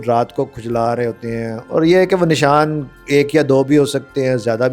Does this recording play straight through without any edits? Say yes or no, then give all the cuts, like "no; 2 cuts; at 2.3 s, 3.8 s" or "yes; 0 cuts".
no; 1 cut; at 1.6 s